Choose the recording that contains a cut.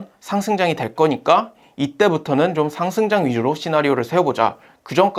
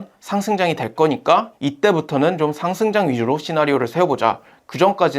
second; 1 cut; at 1.6 s

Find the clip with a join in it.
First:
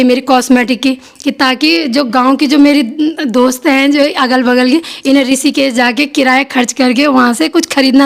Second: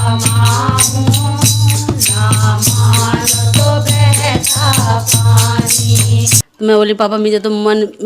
second; 1 cut; at 6.4 s

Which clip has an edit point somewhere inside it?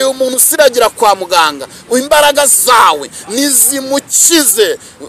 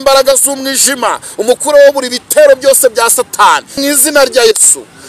second; 1 cut; at 3.8 s

